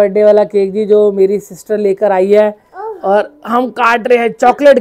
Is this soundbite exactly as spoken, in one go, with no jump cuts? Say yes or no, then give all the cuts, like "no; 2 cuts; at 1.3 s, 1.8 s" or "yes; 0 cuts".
yes; 0 cuts